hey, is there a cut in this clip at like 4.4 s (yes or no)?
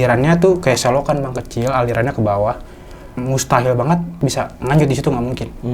yes